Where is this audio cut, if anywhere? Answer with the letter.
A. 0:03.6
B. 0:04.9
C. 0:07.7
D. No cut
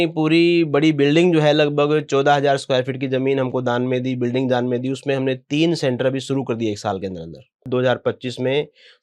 C